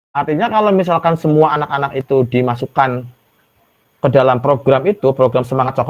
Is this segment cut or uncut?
uncut